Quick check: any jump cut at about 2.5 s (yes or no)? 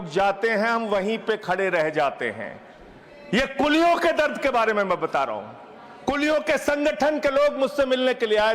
no